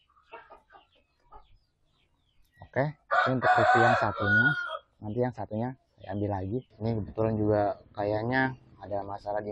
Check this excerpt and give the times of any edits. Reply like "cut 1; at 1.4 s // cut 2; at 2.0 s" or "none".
cut 1; at 6.7 s